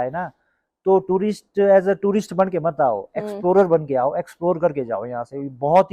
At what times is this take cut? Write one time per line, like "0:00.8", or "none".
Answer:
none